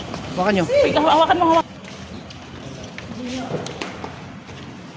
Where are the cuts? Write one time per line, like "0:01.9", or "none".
none